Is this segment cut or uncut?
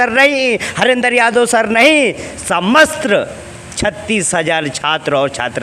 uncut